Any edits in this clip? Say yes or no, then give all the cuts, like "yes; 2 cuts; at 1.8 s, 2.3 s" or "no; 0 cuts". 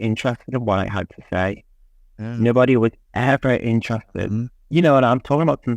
no; 0 cuts